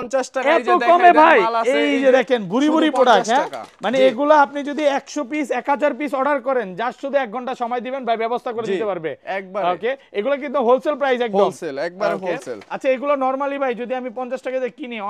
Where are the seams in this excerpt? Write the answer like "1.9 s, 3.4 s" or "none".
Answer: none